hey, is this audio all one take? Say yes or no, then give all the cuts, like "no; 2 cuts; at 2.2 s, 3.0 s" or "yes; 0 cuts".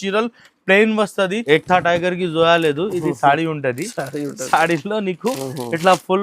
no; 1 cut; at 1.4 s